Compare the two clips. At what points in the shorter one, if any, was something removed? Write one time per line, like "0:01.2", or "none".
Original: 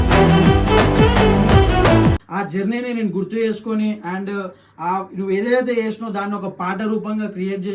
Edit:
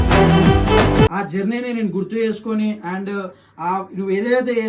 0:01.1